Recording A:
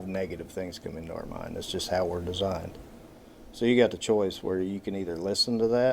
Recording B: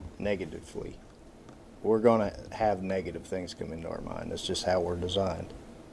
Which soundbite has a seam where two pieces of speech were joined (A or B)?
B